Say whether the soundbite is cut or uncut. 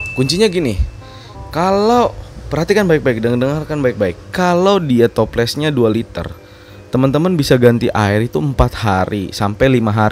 uncut